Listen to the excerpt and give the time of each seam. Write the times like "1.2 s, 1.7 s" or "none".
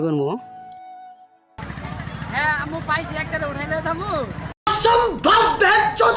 4.7 s